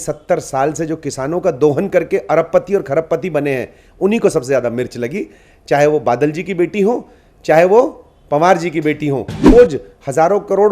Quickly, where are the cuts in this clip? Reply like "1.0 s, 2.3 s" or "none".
9.5 s

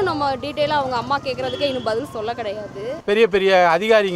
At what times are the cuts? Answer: 3.0 s

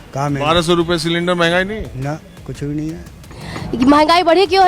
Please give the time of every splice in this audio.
3.4 s

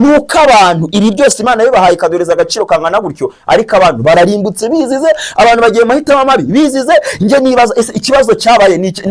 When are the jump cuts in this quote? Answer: none

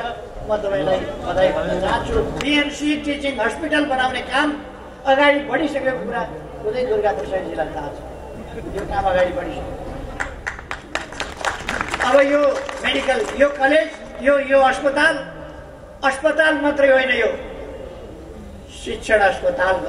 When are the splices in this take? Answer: 2.4 s

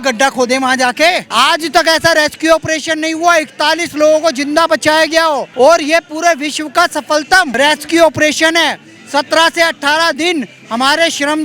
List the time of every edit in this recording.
1.2 s, 5.5 s, 7.5 s

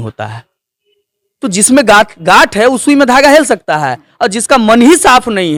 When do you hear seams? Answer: none

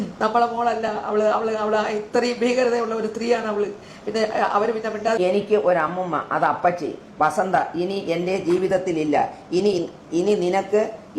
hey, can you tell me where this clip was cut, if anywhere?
5.2 s

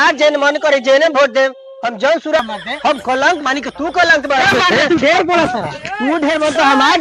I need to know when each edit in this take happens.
2.4 s

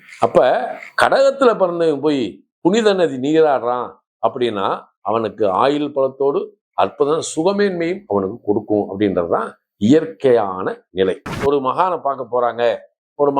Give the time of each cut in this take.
11.3 s

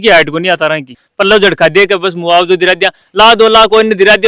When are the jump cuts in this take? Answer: 0.9 s

